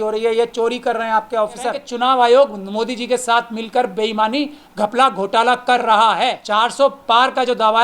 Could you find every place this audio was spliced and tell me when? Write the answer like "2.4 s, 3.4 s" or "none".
1.9 s, 6.4 s